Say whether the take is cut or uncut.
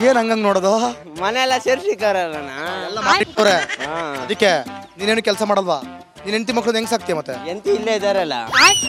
uncut